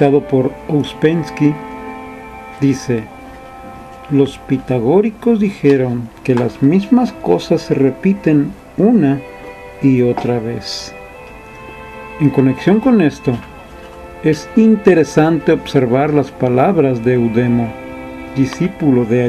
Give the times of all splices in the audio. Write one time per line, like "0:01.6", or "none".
0:06.4